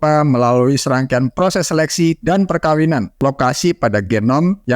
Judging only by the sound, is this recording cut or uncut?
cut